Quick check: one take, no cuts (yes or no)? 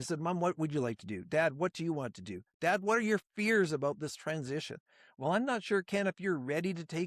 yes